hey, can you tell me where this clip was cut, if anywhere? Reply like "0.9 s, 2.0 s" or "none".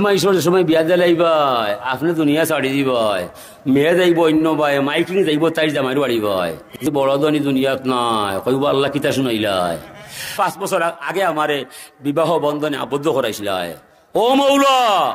6.8 s, 10.2 s